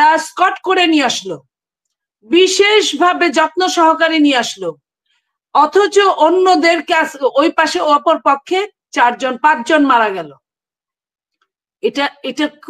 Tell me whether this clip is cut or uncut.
uncut